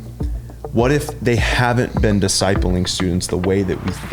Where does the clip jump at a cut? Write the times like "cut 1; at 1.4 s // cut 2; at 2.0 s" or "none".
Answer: none